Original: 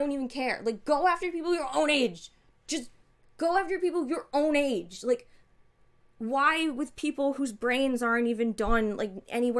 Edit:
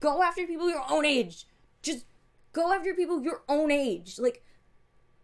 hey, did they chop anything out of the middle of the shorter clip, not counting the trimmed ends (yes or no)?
no